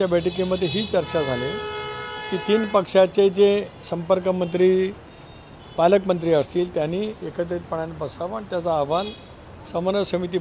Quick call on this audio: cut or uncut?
uncut